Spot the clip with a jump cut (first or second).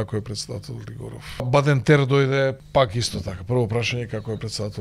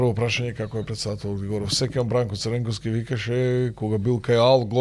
first